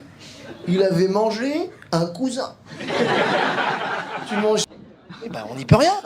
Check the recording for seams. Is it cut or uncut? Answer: cut